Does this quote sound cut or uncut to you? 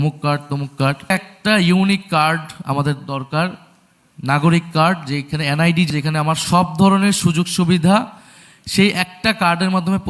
cut